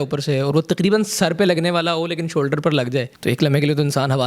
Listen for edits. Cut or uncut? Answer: cut